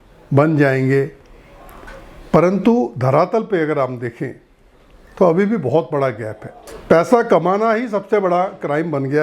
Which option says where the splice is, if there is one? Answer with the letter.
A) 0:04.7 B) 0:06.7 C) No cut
B